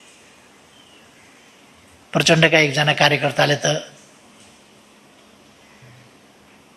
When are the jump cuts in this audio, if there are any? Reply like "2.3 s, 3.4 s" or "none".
none